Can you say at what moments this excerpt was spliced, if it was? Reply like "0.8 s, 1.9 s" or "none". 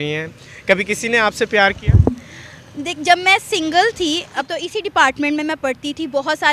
4.5 s